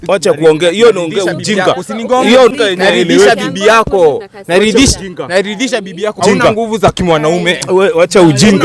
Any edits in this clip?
yes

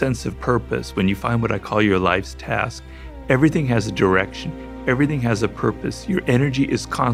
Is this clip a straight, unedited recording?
yes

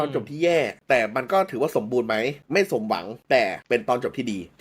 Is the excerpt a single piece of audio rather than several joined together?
no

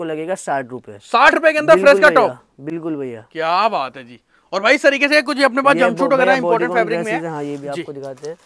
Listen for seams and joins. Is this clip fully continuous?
yes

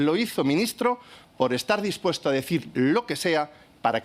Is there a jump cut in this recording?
no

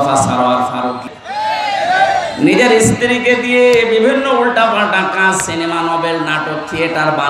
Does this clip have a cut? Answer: yes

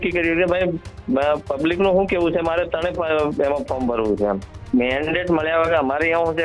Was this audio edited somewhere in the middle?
yes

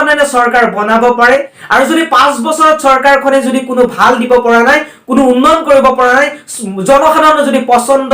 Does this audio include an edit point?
yes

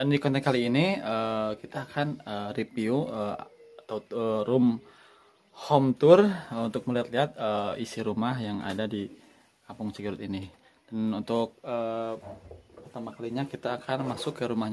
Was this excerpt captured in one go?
yes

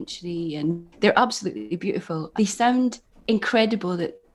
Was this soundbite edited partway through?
yes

